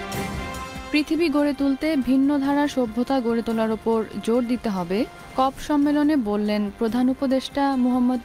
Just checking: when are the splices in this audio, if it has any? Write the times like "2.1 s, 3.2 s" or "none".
0.9 s